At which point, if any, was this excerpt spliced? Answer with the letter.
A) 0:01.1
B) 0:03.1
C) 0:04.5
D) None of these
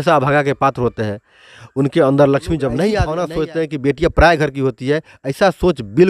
B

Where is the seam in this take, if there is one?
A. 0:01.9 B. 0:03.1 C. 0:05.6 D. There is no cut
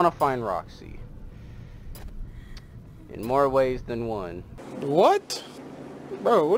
D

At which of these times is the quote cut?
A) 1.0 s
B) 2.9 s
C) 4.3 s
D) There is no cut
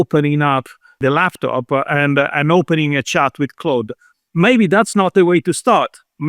A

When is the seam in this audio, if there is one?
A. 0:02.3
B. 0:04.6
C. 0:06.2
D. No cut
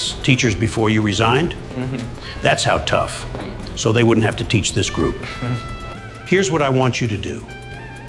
D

